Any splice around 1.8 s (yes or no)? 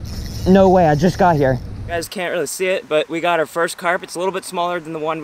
yes